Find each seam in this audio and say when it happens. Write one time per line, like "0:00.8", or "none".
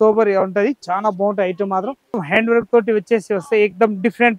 0:02.2

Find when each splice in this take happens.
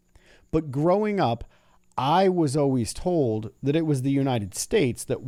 none

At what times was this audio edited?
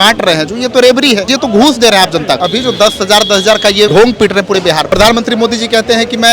0:01.3
0:02.4
0:03.9
0:04.9

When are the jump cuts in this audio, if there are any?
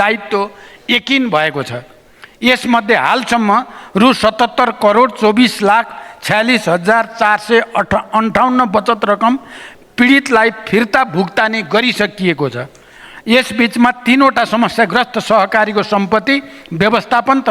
none

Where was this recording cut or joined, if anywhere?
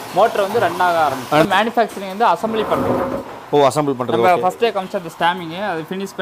0:01.4

